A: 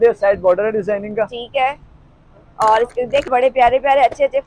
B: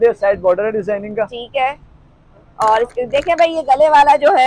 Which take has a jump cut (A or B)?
A